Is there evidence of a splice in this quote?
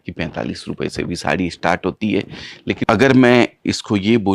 yes; 1 cut; at 2.8 s

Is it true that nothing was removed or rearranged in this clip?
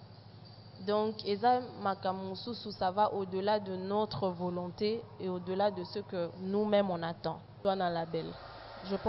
no; 1 cut; at 7.6 s

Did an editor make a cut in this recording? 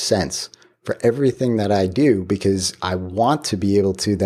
no; 0 cuts

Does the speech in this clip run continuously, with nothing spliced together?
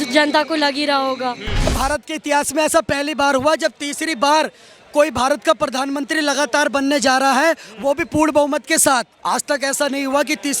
no; 2 cuts; at 1.7 s, 9.1 s

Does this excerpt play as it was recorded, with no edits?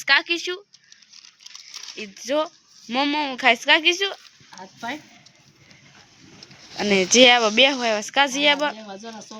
yes; 0 cuts

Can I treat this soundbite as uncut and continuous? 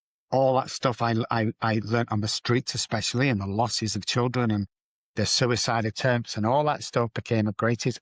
yes; 0 cuts

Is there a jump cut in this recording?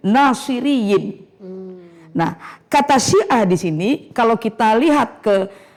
no; 0 cuts

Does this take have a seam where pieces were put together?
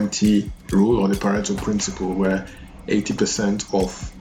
no; 0 cuts

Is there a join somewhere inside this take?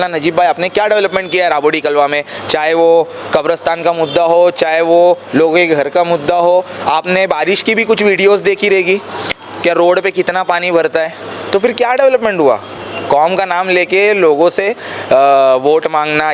no; 0 cuts

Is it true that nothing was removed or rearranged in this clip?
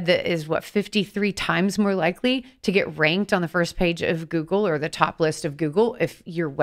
yes; 0 cuts

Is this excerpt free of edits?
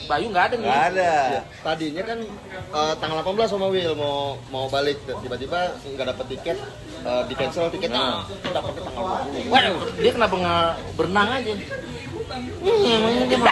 yes; 0 cuts

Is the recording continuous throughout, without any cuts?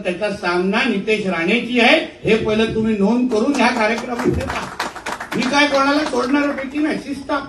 yes; 0 cuts

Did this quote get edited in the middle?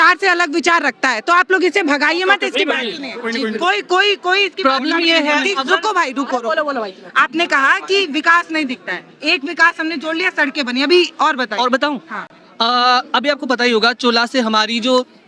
no; 0 cuts

